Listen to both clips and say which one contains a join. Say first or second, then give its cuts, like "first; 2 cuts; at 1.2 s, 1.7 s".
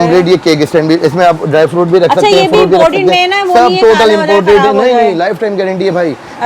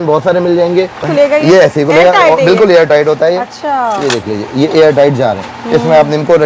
second; 1 cut; at 1.1 s